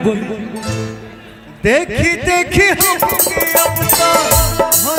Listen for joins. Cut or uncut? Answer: uncut